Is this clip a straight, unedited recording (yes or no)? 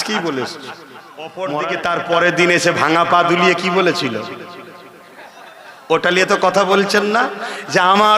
no